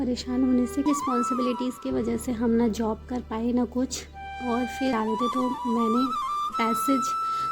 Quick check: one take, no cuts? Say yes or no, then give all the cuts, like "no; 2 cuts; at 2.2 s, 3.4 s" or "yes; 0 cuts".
no; 2 cuts; at 0.9 s, 4.9 s